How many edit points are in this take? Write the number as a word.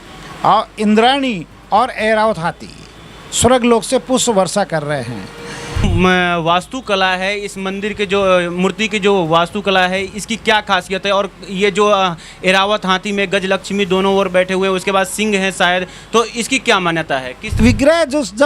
two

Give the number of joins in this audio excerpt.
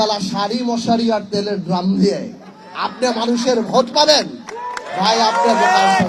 zero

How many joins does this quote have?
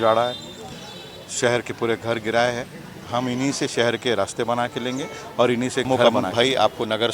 one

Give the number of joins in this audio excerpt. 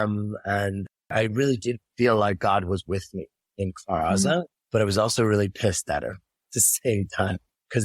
one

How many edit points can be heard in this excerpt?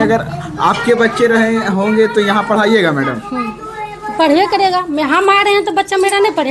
zero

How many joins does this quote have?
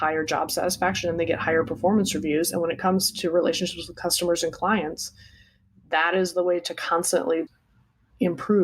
one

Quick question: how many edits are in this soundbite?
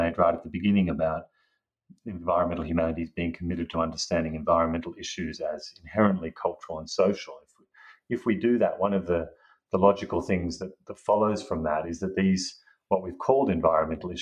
zero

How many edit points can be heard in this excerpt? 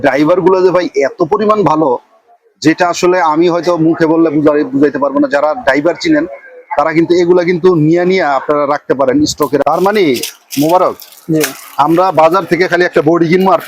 one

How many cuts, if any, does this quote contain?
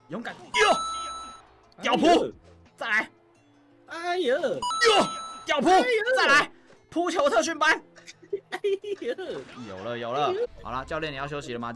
one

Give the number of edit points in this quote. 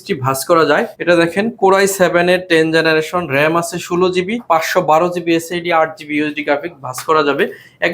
two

